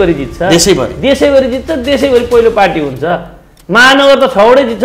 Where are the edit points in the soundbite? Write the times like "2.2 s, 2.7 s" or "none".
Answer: none

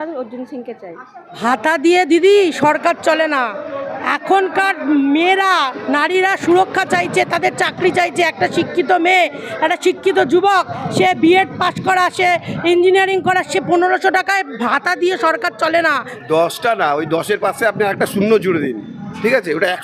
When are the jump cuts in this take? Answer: 1.4 s, 16.1 s

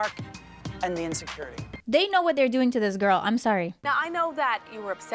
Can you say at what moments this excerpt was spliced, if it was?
1.7 s, 3.7 s

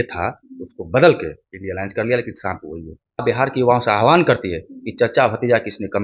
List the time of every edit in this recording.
3.2 s

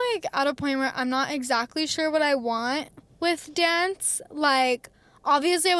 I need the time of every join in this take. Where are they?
none

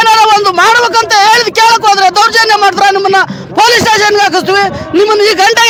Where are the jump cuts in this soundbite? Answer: none

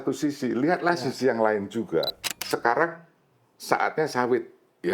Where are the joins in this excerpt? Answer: 2.2 s

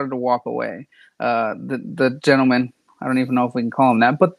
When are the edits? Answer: none

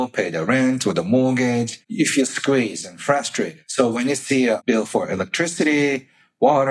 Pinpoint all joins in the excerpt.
1.8 s, 3.6 s, 4.6 s

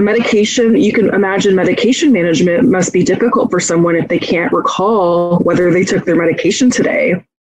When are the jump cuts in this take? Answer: none

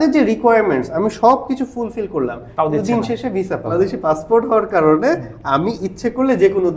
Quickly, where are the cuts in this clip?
3.7 s

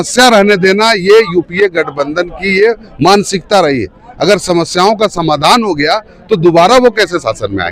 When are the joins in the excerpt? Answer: none

